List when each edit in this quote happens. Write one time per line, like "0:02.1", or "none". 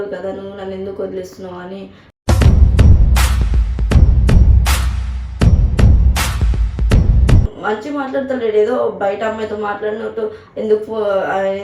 0:07.5